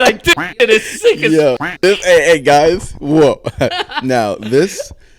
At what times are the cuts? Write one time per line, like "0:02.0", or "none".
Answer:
none